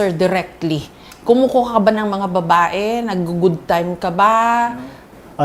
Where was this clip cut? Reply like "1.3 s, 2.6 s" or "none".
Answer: none